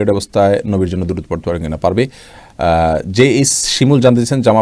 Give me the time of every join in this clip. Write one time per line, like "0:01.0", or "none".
none